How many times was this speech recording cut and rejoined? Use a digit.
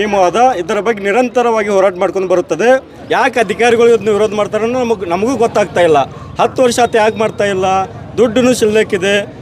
1